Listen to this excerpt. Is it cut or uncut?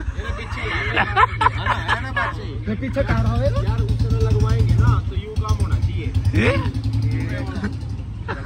uncut